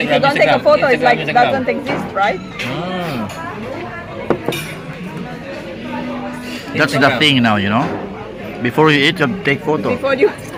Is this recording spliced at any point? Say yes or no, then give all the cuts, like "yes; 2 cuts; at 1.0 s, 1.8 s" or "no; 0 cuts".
no; 0 cuts